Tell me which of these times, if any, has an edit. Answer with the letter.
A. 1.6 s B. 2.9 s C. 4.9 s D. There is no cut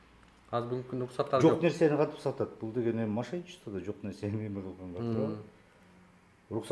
D